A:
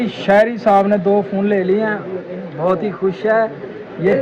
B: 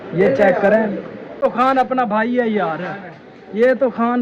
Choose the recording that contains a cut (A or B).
B